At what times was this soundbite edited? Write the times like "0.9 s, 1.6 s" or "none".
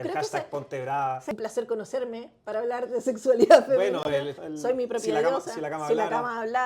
1.3 s, 4.4 s